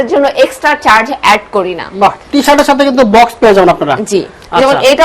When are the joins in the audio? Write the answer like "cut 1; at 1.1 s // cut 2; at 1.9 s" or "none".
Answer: none